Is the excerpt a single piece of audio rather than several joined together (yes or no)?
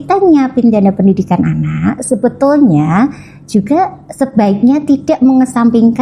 yes